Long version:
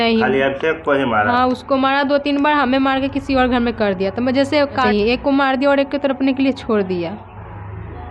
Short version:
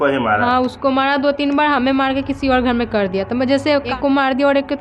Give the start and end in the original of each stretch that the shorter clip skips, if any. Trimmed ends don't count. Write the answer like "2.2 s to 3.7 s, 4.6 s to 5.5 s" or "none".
4.8 s to 5.1 s